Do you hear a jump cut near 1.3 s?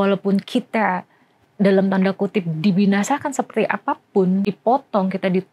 no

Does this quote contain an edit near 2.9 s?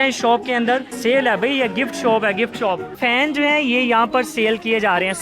yes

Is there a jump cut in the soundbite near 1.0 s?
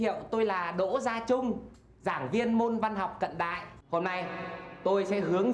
no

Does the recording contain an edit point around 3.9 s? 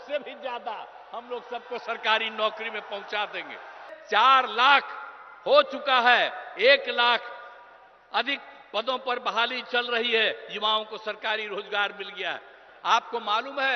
yes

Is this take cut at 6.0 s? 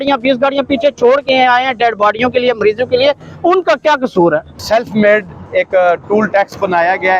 no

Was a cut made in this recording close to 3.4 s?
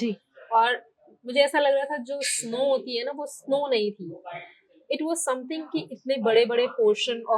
no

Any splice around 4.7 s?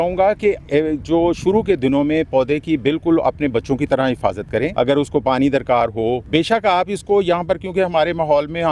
yes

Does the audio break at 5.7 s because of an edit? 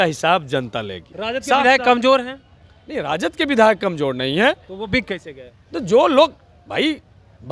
no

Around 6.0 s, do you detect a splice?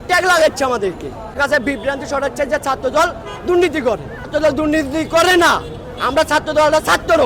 no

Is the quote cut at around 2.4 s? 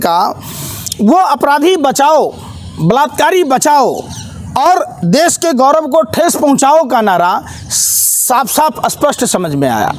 no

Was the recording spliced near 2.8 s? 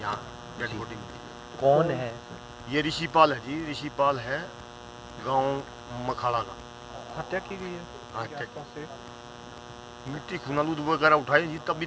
no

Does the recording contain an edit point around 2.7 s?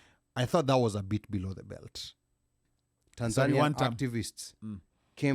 yes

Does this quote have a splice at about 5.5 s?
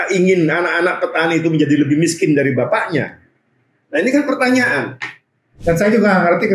yes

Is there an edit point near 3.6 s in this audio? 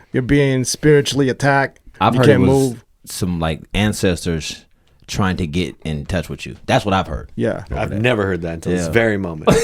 no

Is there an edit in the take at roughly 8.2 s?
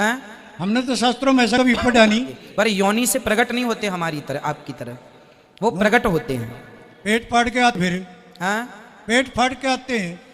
no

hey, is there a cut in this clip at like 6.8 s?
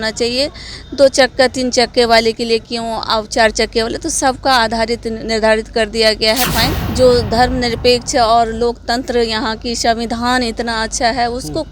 yes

